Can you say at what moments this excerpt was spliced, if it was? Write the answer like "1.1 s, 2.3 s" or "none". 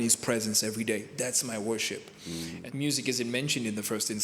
2.6 s